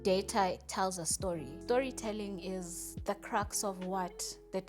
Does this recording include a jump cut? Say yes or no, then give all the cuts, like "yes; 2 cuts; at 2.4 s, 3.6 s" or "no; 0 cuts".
yes; 1 cut; at 1.5 s